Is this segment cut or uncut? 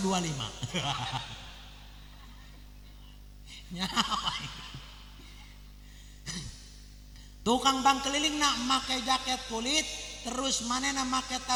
uncut